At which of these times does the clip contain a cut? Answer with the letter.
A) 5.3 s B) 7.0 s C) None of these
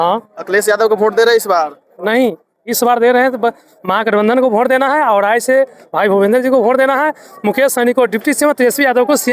C